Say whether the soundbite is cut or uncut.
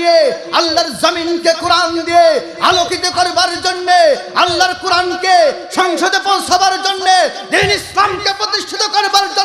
uncut